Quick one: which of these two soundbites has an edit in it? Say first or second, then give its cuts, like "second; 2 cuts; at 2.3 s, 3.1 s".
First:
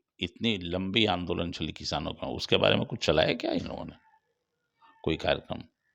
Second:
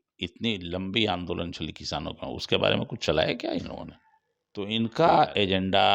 second; 1 cut; at 4.7 s